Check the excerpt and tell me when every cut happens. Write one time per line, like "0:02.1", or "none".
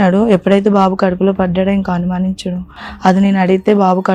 0:02.8